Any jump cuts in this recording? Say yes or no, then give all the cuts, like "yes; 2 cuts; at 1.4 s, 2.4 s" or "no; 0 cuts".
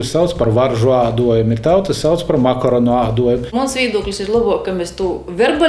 yes; 1 cut; at 3.5 s